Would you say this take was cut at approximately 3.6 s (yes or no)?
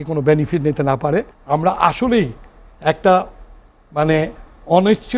no